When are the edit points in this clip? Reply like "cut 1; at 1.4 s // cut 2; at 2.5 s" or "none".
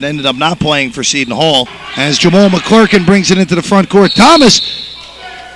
cut 1; at 1.8 s